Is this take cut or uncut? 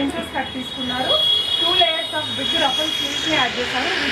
uncut